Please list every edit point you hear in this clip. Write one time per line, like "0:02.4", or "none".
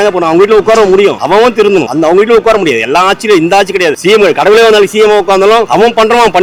none